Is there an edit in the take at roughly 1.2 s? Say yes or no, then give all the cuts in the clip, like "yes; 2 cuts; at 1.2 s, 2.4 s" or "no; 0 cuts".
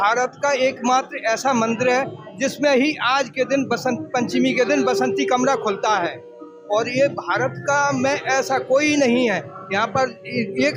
no; 0 cuts